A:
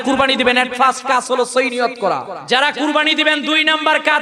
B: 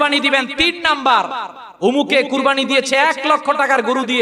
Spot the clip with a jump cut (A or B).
A